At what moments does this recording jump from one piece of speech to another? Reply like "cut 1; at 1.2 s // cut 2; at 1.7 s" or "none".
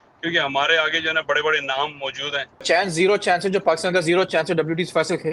cut 1; at 2.6 s